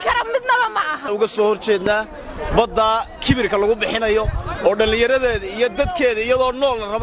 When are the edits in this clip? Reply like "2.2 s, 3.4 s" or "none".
1.0 s